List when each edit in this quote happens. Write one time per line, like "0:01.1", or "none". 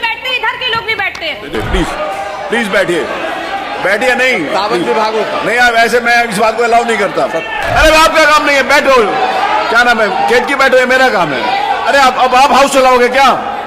0:01.5
0:07.6